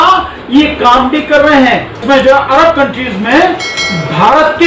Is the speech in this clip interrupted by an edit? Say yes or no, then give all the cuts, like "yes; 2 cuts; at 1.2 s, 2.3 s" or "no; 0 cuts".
yes; 1 cut; at 2.0 s